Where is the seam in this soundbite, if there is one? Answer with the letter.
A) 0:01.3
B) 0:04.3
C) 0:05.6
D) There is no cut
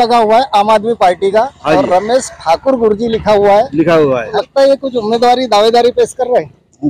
B